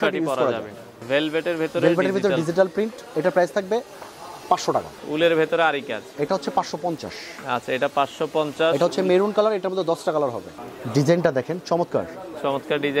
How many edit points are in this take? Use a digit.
3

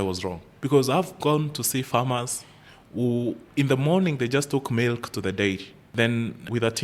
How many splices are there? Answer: 0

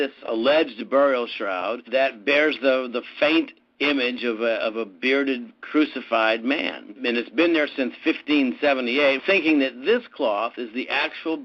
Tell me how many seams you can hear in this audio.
0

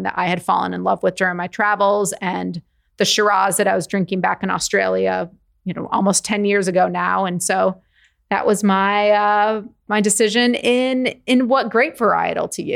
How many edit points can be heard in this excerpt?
1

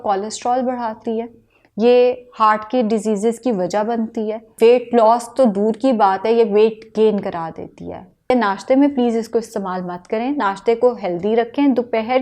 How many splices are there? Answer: 2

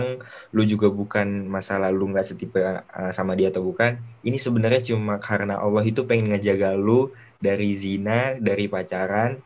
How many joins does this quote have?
0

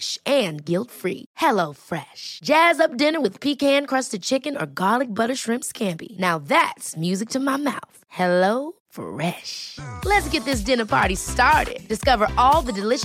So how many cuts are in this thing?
0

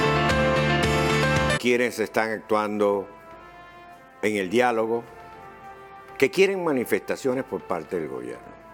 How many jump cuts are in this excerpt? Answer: 0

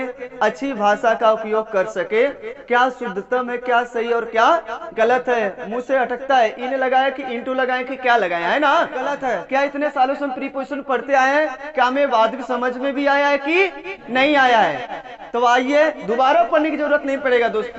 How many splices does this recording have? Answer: 1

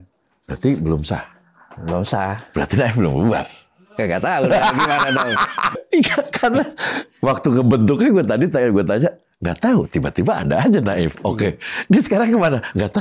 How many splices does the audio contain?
1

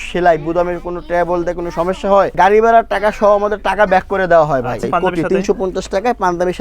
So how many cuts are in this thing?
2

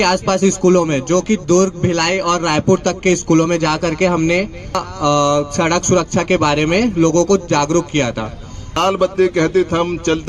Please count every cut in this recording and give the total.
2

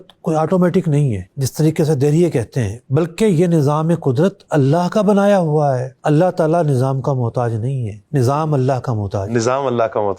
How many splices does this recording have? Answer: 2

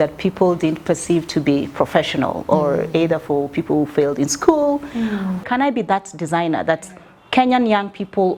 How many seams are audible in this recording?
1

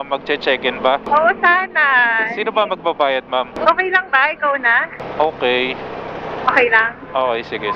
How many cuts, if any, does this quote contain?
0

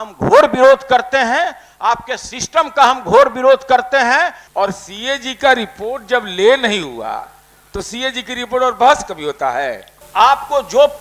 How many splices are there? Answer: 2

